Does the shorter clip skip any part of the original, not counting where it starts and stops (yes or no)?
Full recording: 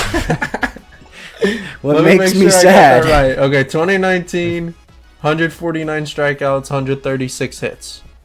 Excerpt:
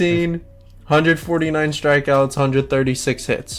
no